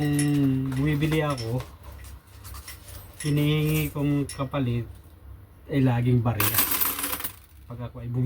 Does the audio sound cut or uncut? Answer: uncut